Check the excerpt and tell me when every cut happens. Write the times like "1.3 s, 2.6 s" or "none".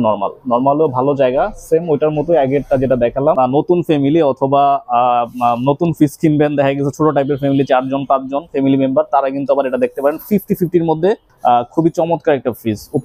3.4 s, 11.3 s